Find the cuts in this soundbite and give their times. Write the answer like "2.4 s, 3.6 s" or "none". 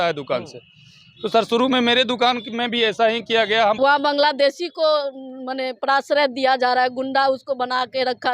3.8 s